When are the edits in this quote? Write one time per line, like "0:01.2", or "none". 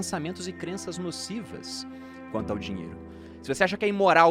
0:03.0